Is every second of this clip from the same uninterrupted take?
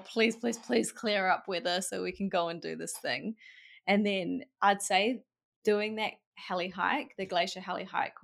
yes; 0 cuts

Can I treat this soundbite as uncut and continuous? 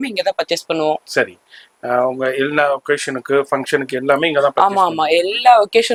yes; 0 cuts

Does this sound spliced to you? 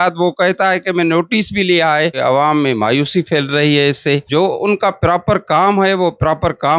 yes; 2 cuts; at 2.2 s, 4.2 s

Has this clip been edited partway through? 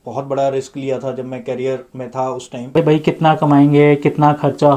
yes; 1 cut; at 2.8 s

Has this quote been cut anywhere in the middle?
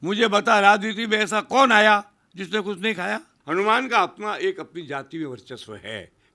yes; 1 cut; at 3.3 s

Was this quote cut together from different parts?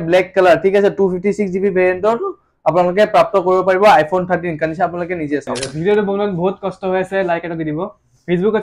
yes; 1 cut; at 5.8 s

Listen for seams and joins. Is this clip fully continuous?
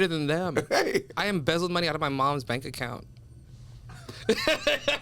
no; 1 cut; at 1.1 s

